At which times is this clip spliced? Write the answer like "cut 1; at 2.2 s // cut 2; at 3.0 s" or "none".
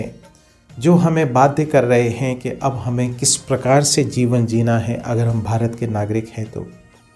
none